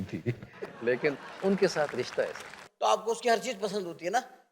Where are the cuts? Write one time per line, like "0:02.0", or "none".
0:02.6

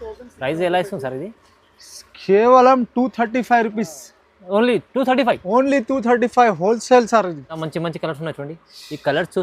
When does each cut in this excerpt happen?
0:07.6

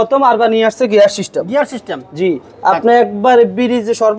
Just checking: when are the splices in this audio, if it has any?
none

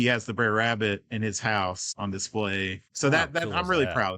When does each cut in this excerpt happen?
0:01.9
0:02.8

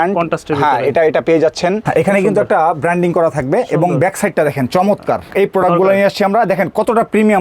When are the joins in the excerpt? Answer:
0:01.8
0:05.3

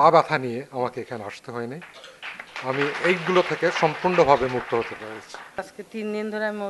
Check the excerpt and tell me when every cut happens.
0:05.6

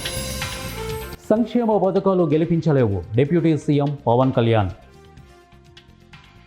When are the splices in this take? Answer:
0:00.9

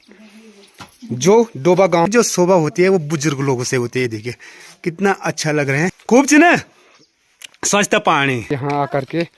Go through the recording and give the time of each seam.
0:02.1
0:06.0
0:08.5

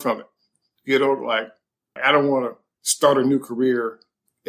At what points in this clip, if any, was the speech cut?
0:01.9

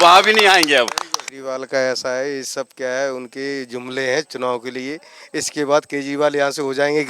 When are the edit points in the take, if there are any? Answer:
0:01.3

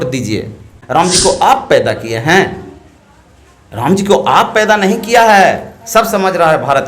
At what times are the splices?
0:01.1

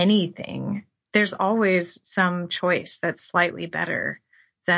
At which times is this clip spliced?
none

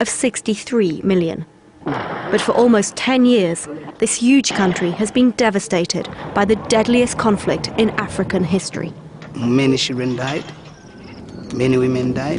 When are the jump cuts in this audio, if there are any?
0:01.3

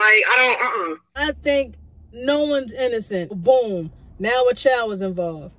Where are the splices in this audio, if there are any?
0:01.1
0:03.3

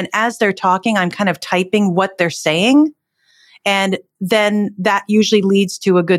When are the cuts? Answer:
none

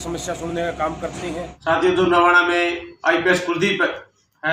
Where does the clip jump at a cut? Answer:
0:01.5

